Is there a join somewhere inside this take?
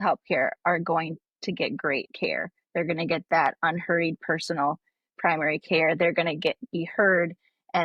no; 0 cuts

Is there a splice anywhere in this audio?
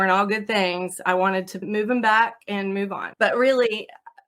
yes; 2 cuts; at 1.6 s, 3.0 s

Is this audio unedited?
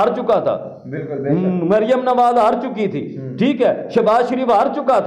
yes; 0 cuts

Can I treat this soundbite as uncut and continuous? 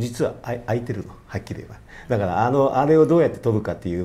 yes; 0 cuts

